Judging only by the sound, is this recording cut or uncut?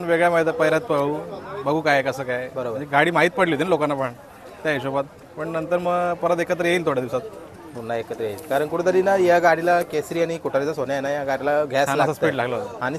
uncut